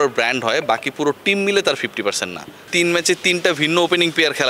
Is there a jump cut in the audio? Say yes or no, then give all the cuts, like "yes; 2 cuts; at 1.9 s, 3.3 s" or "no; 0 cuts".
yes; 1 cut; at 2.6 s